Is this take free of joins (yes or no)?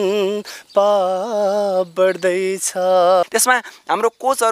no